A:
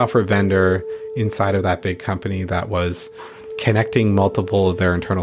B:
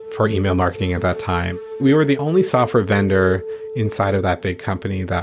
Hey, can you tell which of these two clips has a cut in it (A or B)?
B